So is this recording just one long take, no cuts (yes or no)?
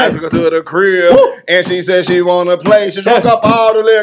yes